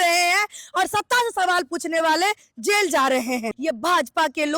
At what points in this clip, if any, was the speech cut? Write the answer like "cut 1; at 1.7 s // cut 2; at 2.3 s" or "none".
cut 1; at 3.6 s